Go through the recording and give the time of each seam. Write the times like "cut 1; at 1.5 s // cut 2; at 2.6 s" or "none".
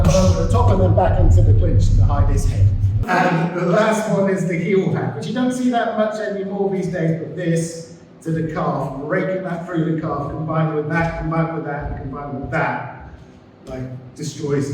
cut 1; at 3.0 s